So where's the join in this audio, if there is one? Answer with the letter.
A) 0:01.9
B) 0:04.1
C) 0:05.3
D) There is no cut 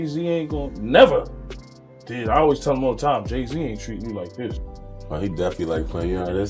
D